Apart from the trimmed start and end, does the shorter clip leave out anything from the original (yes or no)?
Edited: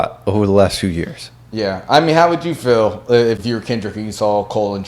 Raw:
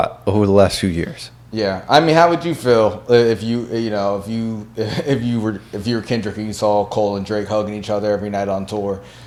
yes